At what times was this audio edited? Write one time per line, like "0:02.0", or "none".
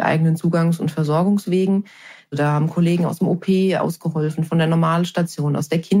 0:02.3